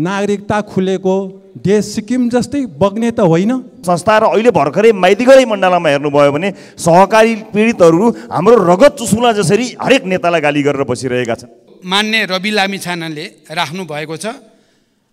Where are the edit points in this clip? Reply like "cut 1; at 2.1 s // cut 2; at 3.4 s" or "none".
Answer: cut 1; at 3.7 s // cut 2; at 11.7 s